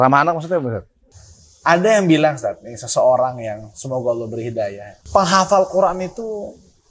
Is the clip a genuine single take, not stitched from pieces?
no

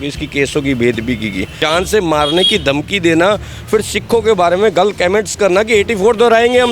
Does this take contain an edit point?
yes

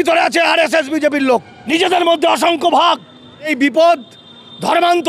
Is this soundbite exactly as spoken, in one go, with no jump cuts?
no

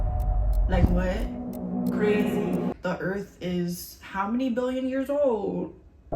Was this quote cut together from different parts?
yes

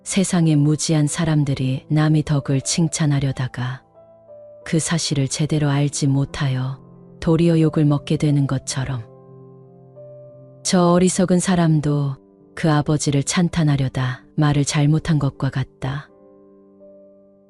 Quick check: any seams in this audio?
no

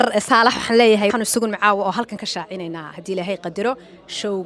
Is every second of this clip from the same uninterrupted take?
no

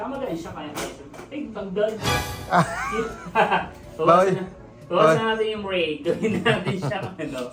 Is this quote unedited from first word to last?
yes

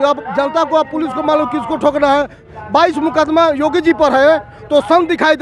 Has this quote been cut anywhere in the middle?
yes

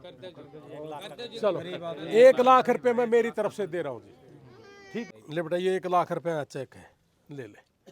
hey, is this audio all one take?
no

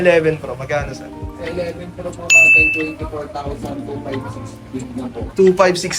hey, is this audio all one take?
yes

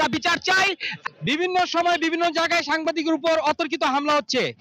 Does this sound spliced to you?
yes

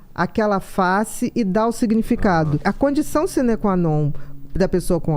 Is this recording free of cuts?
no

